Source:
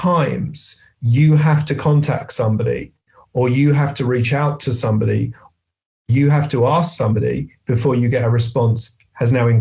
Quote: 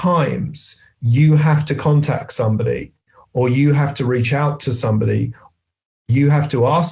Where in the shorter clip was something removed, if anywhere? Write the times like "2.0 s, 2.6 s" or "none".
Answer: none